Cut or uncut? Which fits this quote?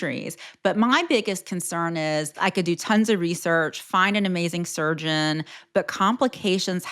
cut